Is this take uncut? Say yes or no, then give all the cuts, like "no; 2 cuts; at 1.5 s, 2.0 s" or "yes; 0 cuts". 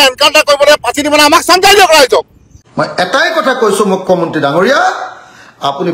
no; 1 cut; at 2.5 s